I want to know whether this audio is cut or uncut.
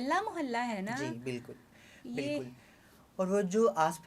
uncut